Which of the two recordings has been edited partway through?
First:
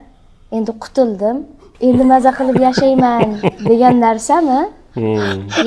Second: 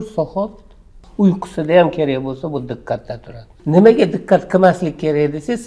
second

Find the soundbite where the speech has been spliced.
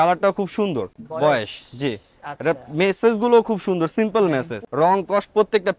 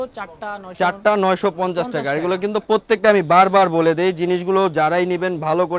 first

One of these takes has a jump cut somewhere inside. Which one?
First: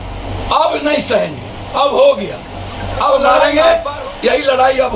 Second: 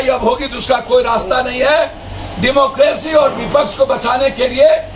first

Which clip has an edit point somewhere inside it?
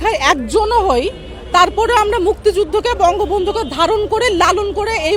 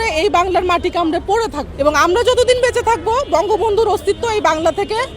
second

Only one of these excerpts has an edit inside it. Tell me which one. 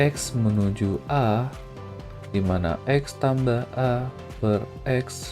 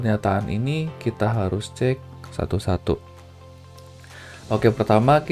second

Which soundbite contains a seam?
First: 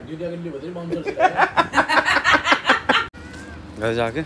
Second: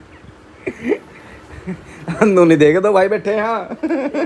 first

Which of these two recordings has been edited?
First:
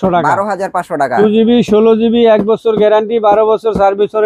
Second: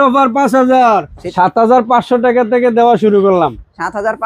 second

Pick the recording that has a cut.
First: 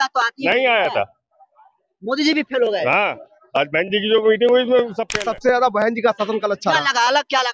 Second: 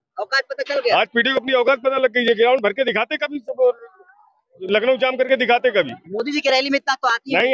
first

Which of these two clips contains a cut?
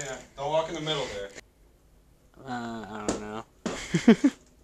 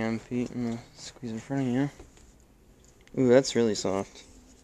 first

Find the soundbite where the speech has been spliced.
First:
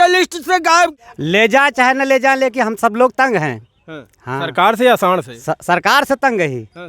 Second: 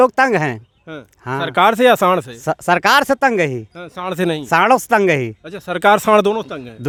first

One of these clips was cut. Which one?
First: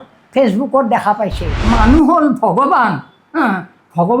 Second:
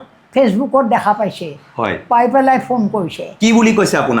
first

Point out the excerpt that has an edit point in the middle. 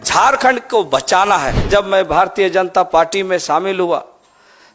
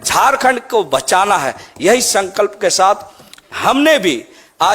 first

